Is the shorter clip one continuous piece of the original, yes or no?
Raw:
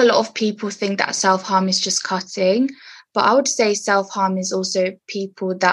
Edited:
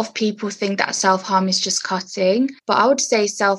no